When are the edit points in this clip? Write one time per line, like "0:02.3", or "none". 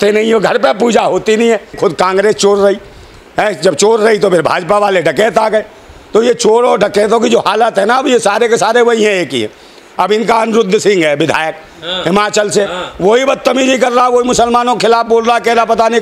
0:01.8